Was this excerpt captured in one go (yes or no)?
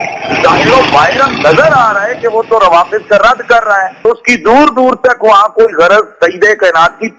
yes